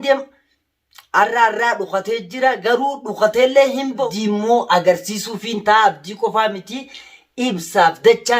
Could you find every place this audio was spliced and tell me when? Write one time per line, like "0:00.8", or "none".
0:04.1